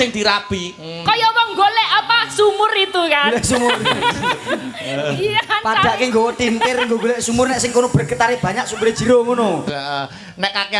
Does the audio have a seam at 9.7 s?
yes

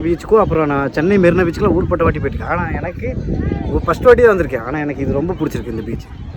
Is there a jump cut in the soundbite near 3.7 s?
no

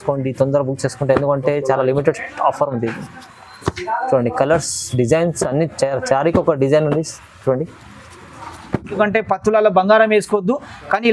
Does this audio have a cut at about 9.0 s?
yes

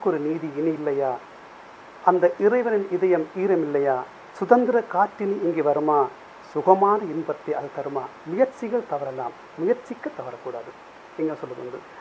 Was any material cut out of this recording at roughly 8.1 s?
yes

